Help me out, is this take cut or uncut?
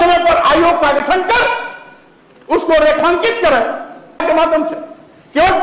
cut